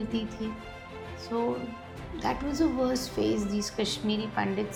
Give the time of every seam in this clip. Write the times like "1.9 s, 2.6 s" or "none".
none